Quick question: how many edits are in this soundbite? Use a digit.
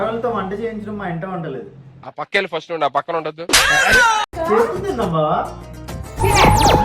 1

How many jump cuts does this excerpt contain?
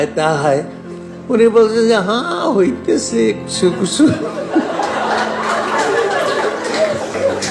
0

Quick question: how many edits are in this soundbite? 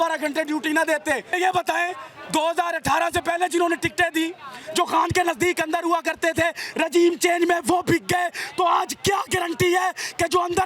1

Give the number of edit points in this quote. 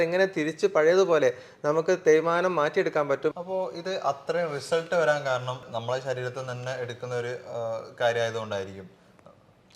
1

